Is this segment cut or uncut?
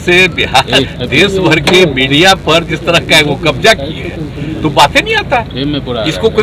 uncut